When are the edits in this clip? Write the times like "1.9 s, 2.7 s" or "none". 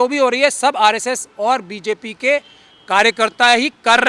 none